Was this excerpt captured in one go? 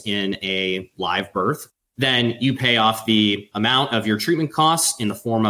yes; 0 cuts

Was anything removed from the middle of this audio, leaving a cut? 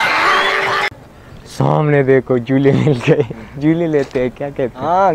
yes; 1 cut; at 1.0 s

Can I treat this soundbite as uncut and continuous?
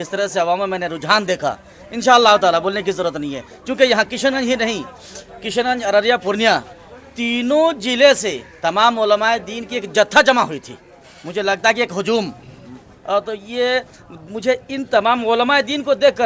yes; 0 cuts

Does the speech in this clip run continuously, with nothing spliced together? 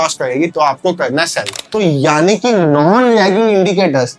no; 1 cut; at 1.6 s

